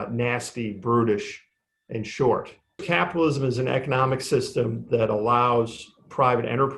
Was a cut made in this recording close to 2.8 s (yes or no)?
yes